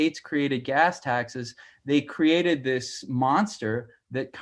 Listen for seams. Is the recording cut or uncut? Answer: uncut